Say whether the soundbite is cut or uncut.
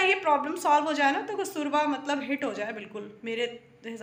uncut